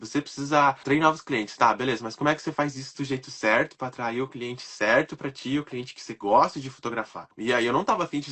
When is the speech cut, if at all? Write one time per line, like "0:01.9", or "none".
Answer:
0:00.8
0:07.3